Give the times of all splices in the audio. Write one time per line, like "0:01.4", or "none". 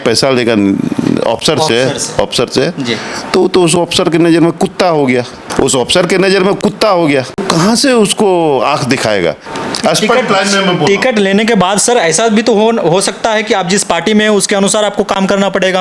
0:05.4
0:07.4
0:09.5